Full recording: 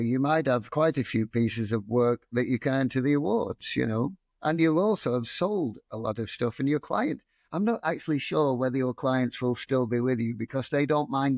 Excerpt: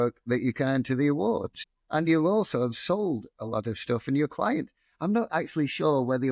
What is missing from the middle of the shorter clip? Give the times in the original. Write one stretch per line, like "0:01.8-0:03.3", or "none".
0:03.7-0:04.1